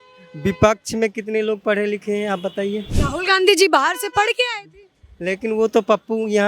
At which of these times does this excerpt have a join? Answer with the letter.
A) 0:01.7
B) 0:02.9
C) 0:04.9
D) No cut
B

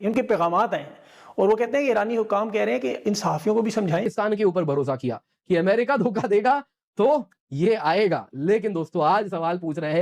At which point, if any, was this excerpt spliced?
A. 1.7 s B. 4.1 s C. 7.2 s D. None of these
B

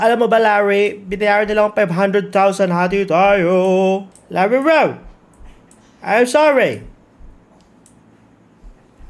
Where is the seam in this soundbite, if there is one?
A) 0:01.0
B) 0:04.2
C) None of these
B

